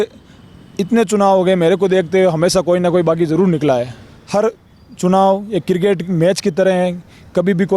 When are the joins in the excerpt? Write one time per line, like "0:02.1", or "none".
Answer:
0:04.2